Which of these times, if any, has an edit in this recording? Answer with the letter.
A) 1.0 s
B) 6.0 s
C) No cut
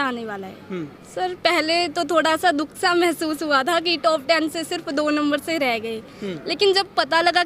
A